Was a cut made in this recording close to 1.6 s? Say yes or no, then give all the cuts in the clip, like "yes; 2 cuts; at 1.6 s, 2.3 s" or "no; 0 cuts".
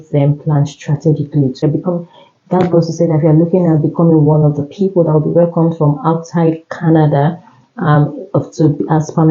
yes; 1 cut; at 1.6 s